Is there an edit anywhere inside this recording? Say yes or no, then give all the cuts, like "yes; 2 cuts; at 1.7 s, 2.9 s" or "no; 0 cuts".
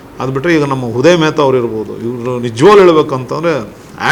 no; 0 cuts